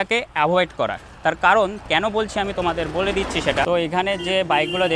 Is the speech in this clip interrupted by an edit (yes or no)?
yes